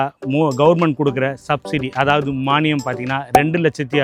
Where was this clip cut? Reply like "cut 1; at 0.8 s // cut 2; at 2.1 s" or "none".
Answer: none